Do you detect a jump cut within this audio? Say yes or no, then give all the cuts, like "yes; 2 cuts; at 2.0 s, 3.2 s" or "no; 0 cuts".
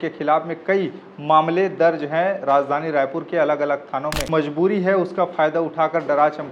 yes; 1 cut; at 4.3 s